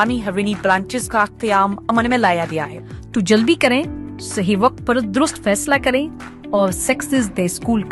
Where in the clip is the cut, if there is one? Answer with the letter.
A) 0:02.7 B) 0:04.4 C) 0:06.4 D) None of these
A